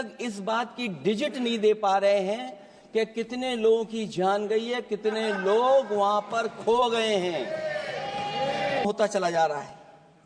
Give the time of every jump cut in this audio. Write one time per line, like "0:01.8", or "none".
0:08.8